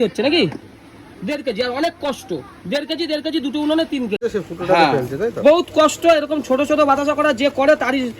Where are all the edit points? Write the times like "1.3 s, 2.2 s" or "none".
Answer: 4.2 s

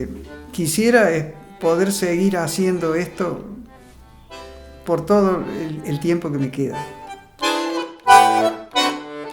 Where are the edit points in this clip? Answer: 7.3 s

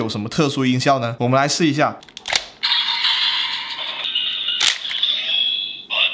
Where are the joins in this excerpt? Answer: 1.1 s, 2.1 s, 4.0 s

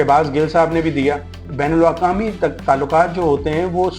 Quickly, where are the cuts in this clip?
1.4 s

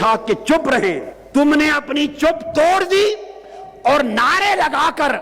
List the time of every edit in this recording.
1.1 s

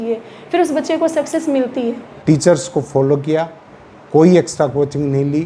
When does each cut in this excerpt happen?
2.1 s

